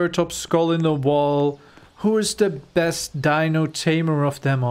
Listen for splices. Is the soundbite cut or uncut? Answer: uncut